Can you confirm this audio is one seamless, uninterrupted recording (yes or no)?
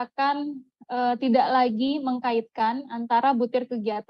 yes